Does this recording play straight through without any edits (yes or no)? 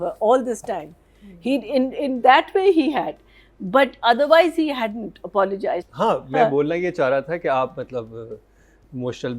no